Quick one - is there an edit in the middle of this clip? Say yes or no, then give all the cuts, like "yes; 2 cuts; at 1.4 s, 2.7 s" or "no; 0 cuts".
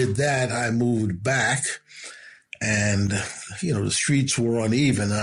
no; 0 cuts